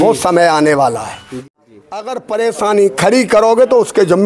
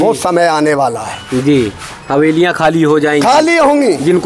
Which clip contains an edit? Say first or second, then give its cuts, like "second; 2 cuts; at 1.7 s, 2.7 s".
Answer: first; 1 cut; at 1.5 s